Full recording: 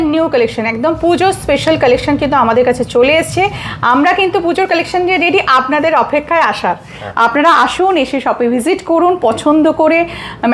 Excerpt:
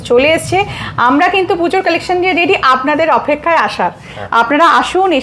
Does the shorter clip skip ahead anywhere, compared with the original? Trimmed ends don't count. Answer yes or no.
no